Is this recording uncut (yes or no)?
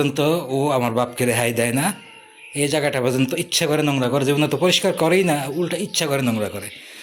yes